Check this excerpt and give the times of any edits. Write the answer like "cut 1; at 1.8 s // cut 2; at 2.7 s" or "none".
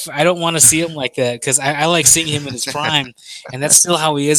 none